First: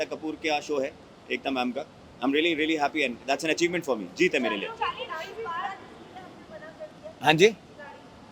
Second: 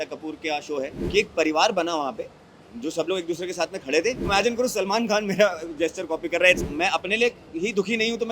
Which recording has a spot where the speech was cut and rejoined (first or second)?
second